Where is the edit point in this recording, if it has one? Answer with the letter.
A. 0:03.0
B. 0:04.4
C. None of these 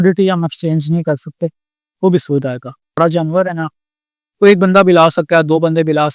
A